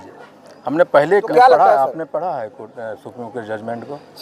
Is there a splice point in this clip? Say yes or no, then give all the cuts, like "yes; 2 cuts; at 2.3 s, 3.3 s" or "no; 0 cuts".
yes; 1 cut; at 1.1 s